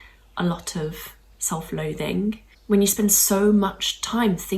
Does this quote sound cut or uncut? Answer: cut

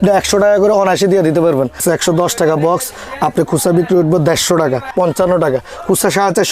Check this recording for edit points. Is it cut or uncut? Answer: cut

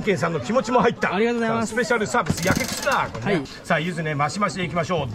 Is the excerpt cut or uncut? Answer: cut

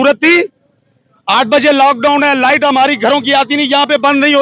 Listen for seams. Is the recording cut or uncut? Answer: uncut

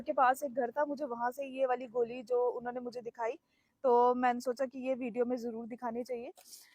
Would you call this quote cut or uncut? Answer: uncut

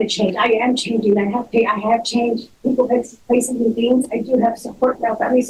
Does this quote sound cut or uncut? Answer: uncut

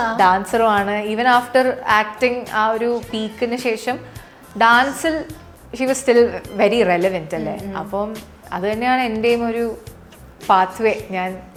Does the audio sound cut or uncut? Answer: uncut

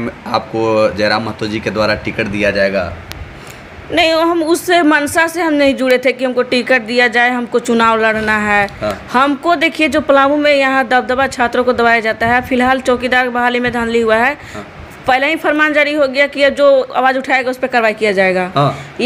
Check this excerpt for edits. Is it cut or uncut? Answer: uncut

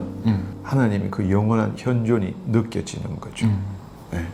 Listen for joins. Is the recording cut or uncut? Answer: uncut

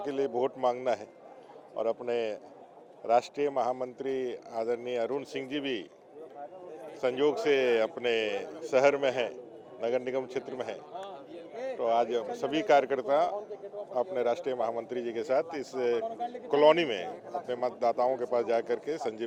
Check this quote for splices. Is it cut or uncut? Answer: uncut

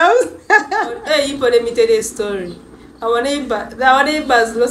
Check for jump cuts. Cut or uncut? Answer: cut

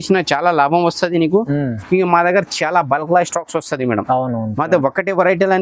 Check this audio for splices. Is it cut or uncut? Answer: uncut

